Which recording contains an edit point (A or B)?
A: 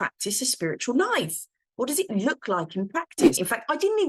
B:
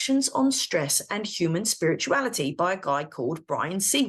A